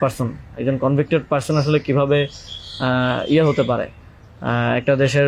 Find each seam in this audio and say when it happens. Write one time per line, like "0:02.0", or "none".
none